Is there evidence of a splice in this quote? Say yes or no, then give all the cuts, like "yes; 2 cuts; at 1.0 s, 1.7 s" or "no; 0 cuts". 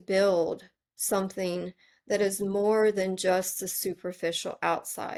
no; 0 cuts